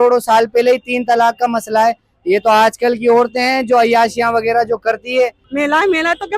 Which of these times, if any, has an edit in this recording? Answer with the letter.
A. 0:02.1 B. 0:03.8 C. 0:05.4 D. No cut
C